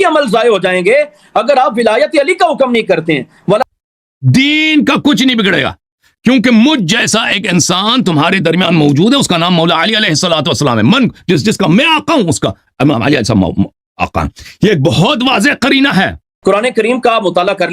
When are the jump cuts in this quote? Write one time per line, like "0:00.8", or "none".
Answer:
0:03.6
0:16.2